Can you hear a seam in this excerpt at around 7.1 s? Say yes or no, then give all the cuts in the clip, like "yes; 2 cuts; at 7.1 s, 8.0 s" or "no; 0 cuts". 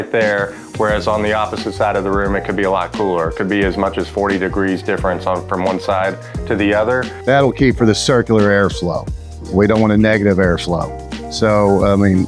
yes; 1 cut; at 7.1 s